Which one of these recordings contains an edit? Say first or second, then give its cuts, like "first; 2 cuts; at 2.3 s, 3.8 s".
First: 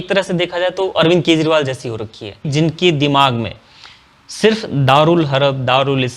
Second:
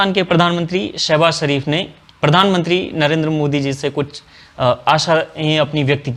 first; 1 cut; at 2.5 s